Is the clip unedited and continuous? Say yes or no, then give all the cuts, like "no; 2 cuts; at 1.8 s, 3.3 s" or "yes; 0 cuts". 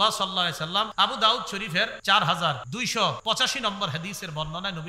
no; 3 cuts; at 0.9 s, 2.0 s, 3.1 s